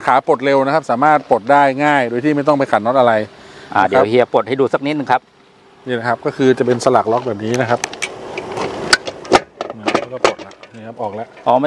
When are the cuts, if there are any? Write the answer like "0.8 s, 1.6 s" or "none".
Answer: none